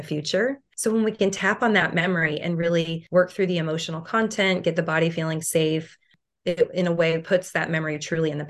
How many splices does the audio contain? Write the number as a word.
zero